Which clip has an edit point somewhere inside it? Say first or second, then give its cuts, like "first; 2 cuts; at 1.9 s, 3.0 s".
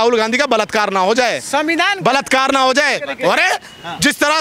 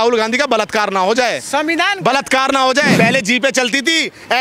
second; 1 cut; at 2.9 s